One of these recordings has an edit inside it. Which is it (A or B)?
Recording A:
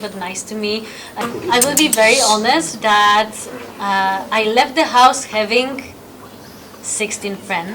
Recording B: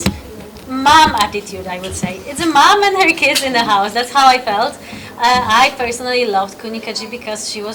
A